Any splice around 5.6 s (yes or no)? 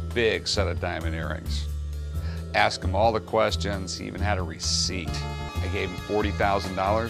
yes